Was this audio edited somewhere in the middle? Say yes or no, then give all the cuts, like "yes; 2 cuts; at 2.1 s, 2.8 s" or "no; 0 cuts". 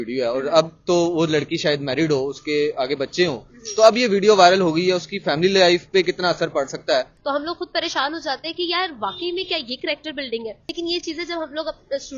yes; 2 cuts; at 7.1 s, 10.6 s